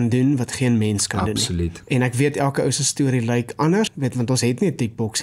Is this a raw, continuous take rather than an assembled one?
no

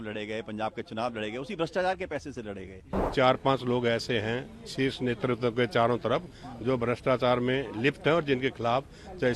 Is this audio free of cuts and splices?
no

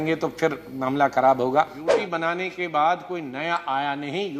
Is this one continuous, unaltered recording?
no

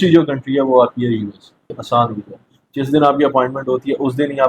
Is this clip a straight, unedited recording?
no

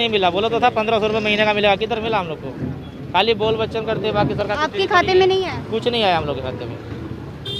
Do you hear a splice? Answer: no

